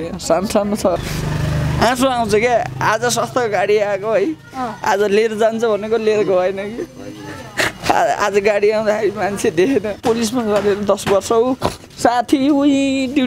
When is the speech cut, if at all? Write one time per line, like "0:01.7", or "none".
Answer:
0:01.0
0:10.0